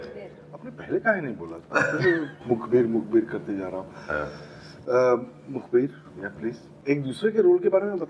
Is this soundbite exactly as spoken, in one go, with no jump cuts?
no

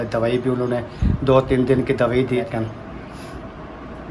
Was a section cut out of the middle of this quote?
yes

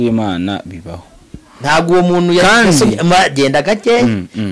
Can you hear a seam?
no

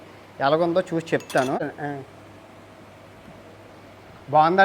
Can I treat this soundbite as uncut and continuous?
no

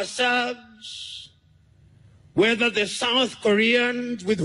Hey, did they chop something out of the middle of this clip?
no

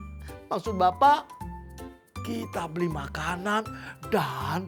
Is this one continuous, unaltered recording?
yes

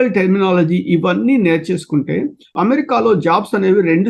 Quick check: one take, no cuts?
no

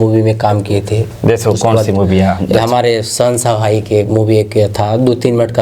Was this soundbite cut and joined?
no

